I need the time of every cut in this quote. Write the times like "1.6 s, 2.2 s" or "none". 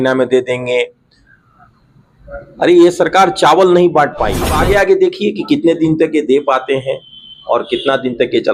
4.5 s

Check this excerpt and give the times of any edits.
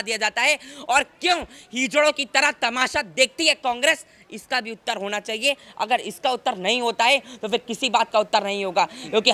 none

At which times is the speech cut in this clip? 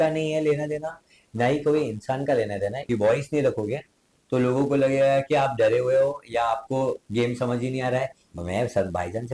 2.8 s, 8.2 s

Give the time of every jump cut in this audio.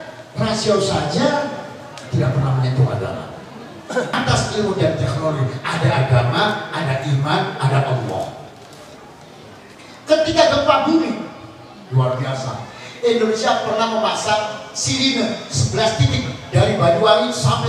4.1 s, 9.8 s

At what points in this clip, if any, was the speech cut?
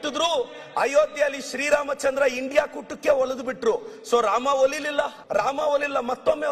5.2 s

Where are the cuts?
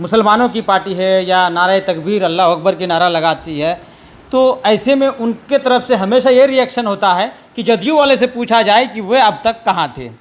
none

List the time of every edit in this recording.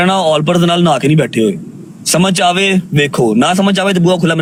none

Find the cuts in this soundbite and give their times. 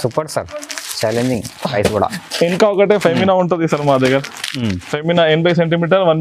none

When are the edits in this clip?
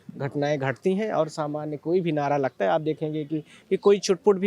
3.5 s

